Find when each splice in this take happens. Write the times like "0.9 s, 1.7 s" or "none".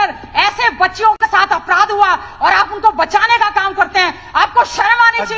none

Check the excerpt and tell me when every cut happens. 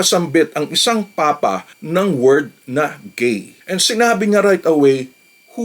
1.7 s, 3.5 s

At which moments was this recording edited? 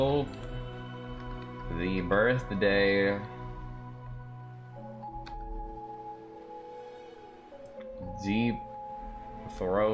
none

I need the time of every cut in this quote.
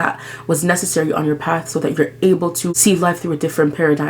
2.7 s

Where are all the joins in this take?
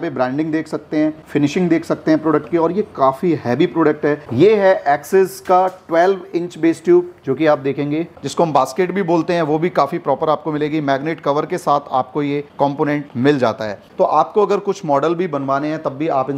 4.2 s, 8.2 s, 13.9 s

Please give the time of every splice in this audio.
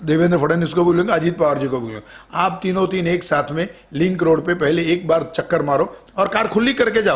6.0 s

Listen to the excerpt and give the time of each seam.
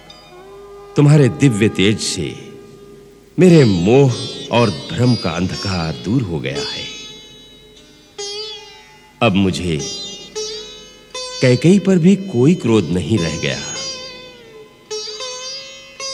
none

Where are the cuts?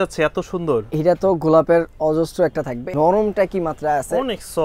2.9 s

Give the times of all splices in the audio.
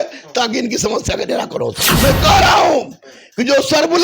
1.9 s

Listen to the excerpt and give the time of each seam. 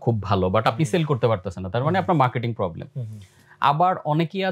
none

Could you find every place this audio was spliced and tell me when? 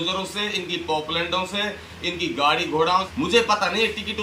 3.1 s

